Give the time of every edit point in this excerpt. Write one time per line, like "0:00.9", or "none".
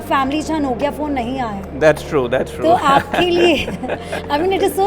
none